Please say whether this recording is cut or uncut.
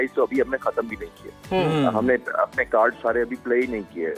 uncut